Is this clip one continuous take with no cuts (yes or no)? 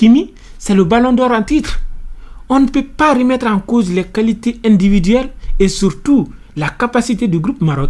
yes